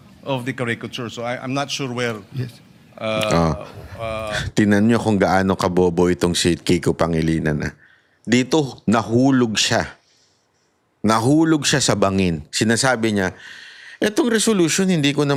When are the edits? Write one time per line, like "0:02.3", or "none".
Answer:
none